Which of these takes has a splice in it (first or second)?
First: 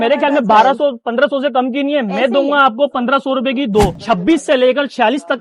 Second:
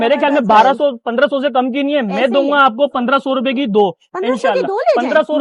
first